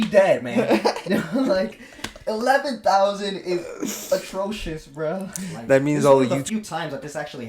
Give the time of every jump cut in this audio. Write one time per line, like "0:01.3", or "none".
0:06.4